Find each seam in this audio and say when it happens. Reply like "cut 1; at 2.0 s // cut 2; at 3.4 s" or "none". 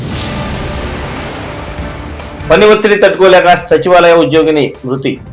none